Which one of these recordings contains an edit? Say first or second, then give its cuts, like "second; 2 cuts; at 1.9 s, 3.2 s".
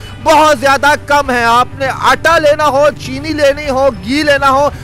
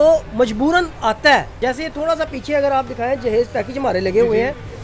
second; 1 cut; at 1.5 s